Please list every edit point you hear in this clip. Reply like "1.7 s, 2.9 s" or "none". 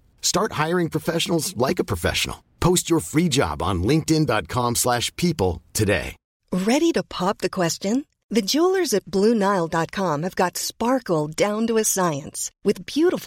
6.4 s